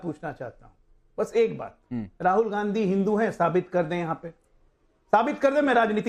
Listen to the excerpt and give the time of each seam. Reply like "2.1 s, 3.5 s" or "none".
none